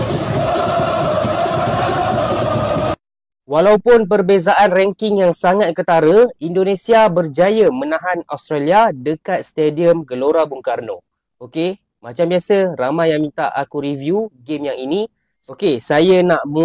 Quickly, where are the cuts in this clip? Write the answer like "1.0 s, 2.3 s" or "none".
none